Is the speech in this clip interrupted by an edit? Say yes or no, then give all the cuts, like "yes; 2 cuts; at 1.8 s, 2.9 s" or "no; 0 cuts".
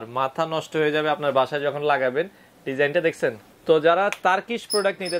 yes; 1 cut; at 3.5 s